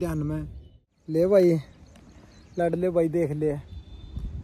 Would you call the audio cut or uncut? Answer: cut